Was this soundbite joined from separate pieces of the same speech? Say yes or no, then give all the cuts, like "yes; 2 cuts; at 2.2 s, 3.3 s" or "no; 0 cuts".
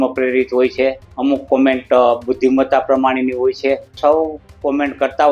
yes; 2 cuts; at 1.1 s, 3.9 s